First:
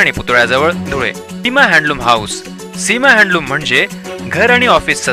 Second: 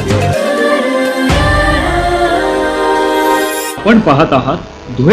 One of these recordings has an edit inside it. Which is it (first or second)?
first